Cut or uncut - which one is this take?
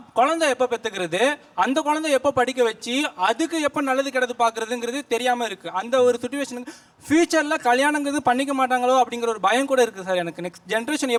uncut